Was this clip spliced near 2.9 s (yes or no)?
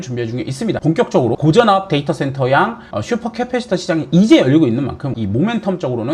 no